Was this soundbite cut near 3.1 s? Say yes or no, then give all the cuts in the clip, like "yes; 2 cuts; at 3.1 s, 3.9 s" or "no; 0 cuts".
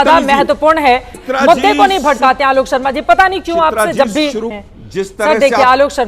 no; 1 cut; at 4.5 s